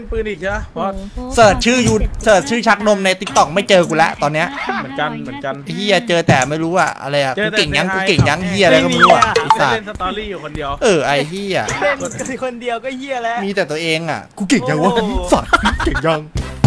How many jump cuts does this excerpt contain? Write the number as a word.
zero